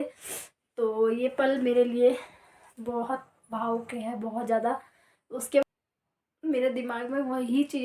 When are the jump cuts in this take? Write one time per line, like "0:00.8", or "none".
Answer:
0:05.6